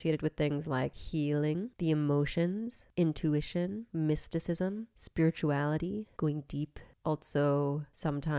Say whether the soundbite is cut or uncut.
cut